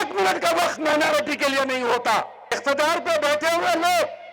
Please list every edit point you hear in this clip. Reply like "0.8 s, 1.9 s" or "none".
2.4 s

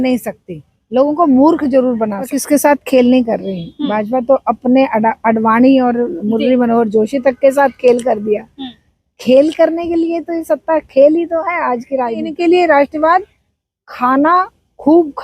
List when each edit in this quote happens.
2.4 s, 12.3 s

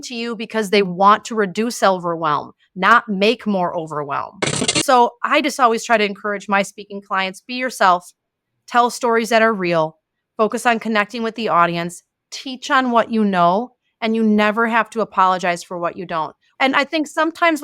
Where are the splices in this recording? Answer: 4.7 s, 16.4 s

